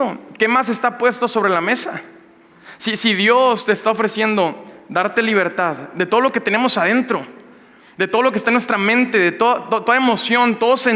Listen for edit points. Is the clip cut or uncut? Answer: uncut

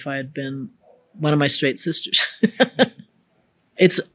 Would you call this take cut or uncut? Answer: cut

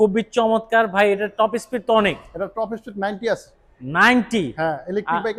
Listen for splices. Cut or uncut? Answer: uncut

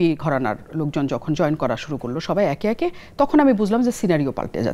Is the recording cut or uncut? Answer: uncut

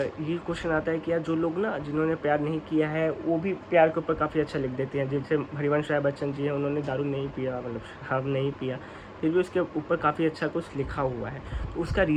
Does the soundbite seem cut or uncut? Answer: uncut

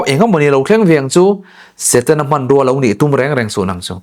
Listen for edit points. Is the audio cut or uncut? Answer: uncut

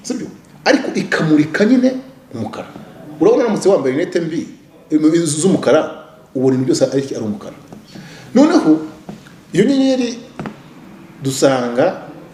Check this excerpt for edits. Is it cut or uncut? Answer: uncut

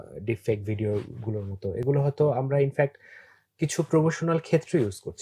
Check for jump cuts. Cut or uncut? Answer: uncut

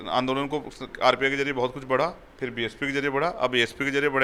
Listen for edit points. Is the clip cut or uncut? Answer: uncut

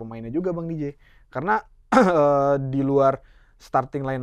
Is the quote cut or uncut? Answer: uncut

